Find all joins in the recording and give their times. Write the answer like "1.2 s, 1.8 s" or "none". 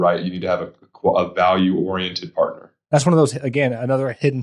2.7 s